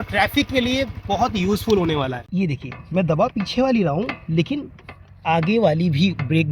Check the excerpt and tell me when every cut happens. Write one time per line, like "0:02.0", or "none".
0:02.2